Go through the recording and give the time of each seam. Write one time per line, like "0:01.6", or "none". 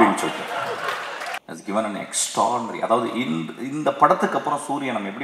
0:01.2

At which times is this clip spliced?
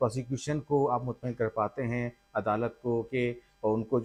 none

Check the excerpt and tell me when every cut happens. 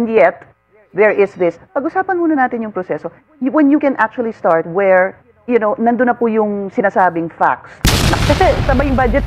0:08.0

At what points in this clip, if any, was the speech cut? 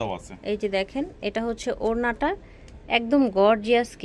none

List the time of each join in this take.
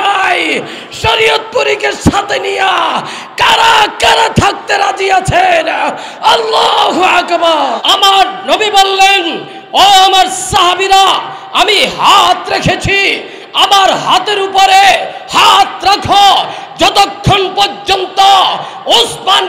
0:07.8

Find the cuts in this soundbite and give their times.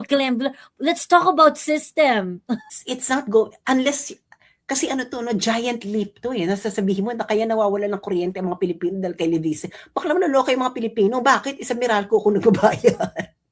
0:02.7

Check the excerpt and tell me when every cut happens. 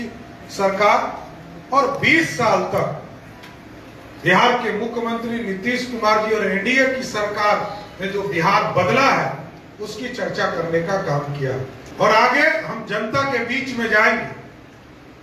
0:11.8

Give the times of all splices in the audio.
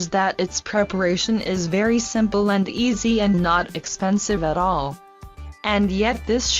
0:02.7

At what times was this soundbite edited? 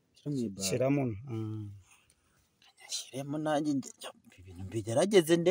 none

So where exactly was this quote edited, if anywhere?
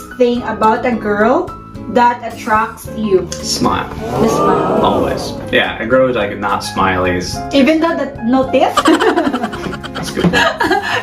none

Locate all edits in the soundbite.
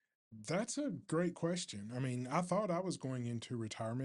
none

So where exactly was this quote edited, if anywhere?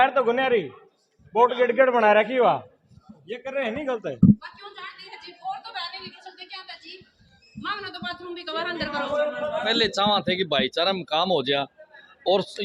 none

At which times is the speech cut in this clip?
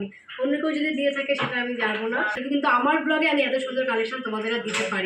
0:02.4

